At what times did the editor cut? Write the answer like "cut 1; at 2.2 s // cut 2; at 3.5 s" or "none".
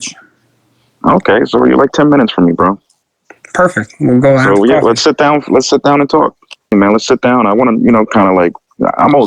cut 1; at 6.7 s